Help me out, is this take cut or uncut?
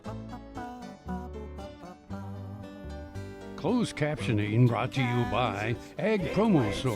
cut